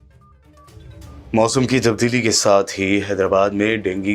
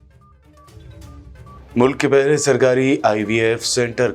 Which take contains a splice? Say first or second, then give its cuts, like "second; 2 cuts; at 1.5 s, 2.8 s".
second; 1 cut; at 0.9 s